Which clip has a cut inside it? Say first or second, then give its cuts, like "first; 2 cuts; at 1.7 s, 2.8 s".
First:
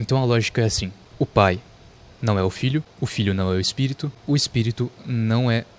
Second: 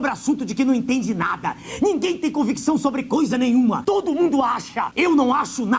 second; 2 cuts; at 3.8 s, 4.8 s